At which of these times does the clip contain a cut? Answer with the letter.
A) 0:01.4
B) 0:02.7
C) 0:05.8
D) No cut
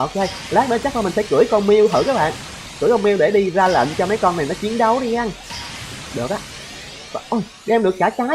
D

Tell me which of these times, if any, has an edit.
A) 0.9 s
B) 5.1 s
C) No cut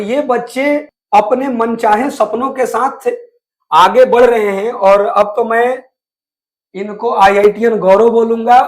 A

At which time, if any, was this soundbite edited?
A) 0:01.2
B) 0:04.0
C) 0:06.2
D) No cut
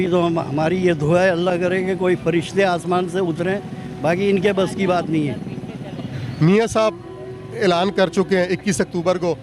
C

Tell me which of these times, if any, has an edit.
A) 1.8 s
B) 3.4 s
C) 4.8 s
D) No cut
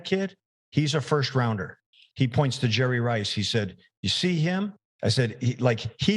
C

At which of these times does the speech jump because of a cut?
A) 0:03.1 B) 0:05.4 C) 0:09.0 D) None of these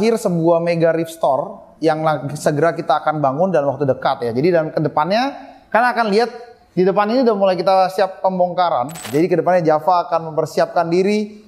C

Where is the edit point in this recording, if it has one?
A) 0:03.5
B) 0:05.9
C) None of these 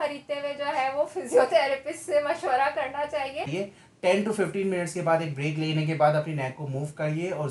A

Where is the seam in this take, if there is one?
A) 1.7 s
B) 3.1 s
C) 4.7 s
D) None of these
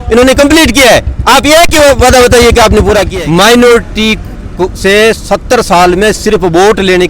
B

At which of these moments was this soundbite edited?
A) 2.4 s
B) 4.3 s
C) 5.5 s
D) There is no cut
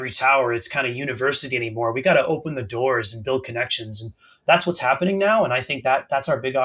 D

